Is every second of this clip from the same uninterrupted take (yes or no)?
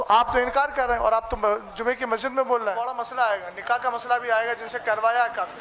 no